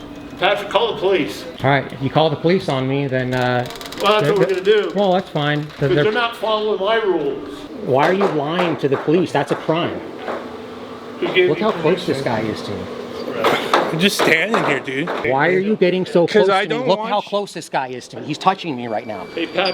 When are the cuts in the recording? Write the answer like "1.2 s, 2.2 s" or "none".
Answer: 1.4 s, 7.6 s, 15.2 s